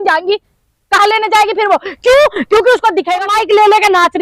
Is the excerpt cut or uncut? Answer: cut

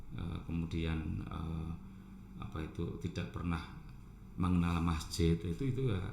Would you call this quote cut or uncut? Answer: uncut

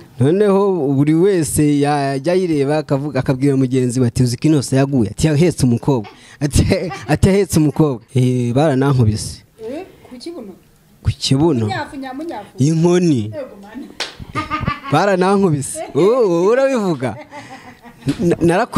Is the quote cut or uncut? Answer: cut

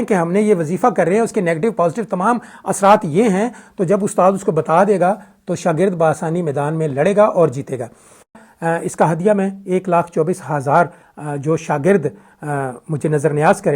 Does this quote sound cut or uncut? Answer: cut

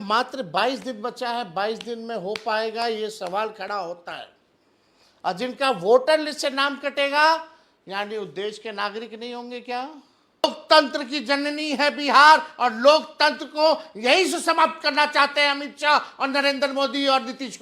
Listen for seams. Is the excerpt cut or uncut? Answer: cut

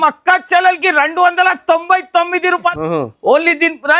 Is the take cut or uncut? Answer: cut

